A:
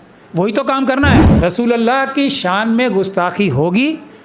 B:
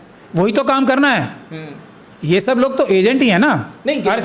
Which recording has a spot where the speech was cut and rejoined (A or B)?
A